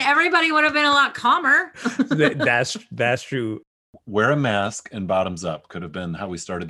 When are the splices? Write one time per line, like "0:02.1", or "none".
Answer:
0:03.7